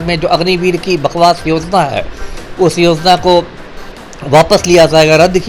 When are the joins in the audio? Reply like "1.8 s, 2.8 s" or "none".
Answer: none